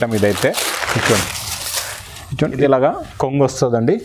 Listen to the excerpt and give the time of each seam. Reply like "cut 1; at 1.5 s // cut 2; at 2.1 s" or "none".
cut 1; at 2.5 s